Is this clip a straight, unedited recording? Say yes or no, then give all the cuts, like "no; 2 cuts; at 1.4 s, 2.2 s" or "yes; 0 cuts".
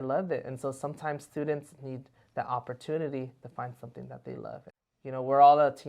no; 1 cut; at 4.7 s